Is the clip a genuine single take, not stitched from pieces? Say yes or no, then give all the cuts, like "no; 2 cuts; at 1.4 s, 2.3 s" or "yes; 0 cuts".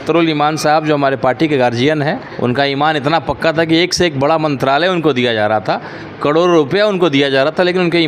no; 1 cut; at 2.3 s